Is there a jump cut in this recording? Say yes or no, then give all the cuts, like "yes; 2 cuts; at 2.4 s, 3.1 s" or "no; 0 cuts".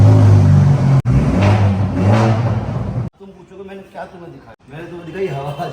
yes; 3 cuts; at 1.0 s, 3.1 s, 4.5 s